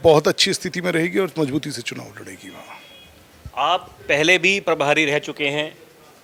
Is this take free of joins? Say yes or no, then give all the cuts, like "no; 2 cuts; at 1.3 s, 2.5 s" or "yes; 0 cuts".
yes; 0 cuts